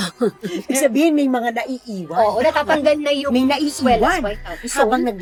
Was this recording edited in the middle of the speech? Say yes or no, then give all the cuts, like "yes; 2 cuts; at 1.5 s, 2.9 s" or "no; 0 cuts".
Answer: no; 0 cuts